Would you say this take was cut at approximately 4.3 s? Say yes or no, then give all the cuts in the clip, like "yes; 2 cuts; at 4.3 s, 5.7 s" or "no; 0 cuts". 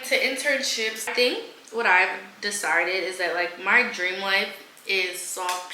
no; 1 cut; at 1.1 s